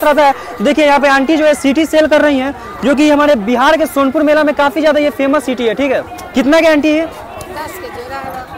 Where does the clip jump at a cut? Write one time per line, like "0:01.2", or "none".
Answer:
none

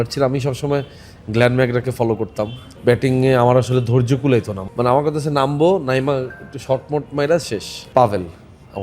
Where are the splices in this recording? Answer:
0:02.6
0:04.6
0:07.7

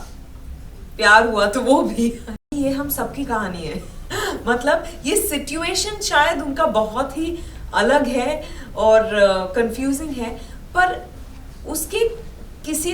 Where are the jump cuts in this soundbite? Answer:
0:02.5

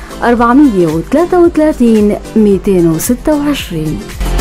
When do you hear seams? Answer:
none

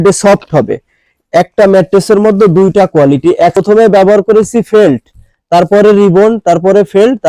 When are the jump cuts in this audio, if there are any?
0:01.1
0:03.6

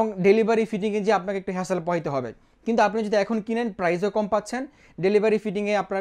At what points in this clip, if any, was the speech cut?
none

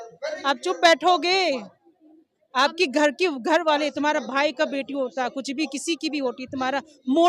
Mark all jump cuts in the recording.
none

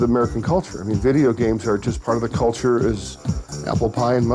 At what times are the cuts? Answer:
0:01.9

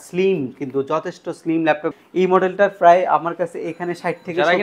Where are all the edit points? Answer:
0:02.0

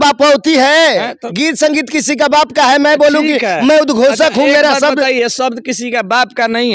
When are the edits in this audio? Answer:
none

